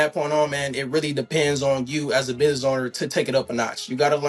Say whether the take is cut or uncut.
uncut